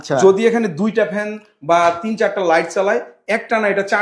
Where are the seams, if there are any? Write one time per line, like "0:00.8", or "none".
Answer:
none